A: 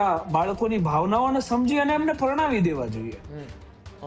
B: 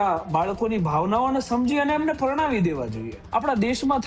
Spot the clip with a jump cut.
B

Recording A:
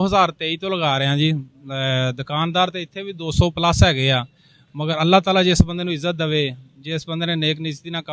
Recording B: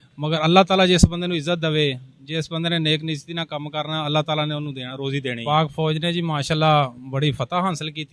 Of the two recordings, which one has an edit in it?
B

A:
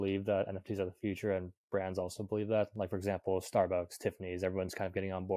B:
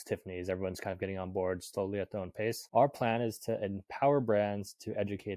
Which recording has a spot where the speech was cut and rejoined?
B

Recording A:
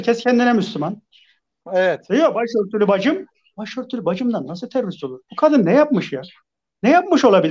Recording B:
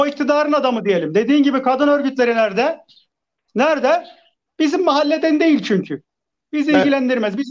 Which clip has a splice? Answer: A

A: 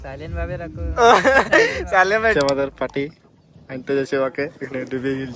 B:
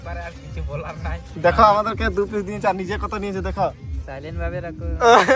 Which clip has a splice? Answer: A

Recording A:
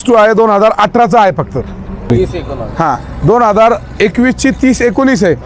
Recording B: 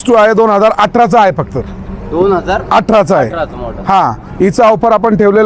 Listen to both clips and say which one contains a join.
A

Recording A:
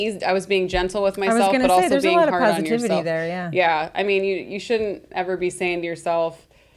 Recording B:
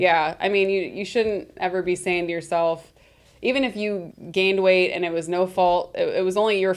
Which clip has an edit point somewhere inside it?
B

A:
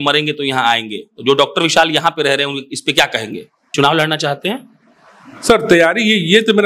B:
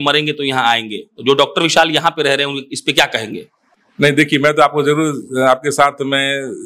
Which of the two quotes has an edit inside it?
A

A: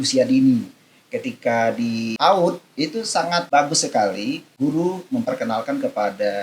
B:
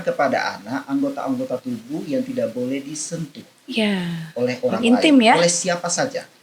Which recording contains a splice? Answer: A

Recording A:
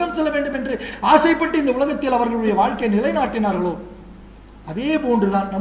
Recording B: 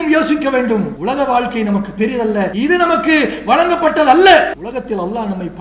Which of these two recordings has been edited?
B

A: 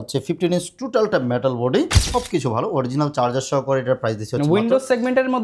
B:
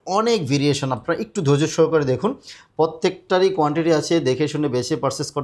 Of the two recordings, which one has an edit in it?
A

